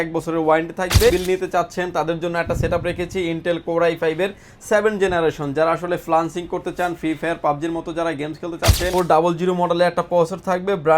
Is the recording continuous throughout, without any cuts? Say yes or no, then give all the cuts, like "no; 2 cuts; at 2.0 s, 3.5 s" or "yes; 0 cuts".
no; 2 cuts; at 1.1 s, 8.9 s